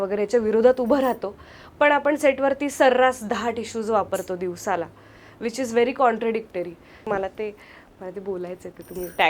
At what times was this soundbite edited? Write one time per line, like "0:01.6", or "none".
0:07.1